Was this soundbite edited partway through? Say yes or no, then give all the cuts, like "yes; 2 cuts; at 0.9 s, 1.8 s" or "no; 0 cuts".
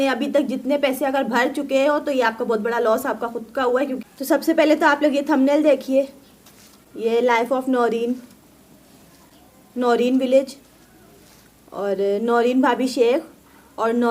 yes; 1 cut; at 4.0 s